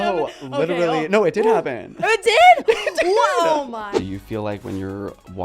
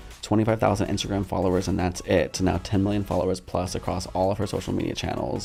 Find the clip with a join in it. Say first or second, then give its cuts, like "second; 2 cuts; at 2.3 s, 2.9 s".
first; 1 cut; at 3.9 s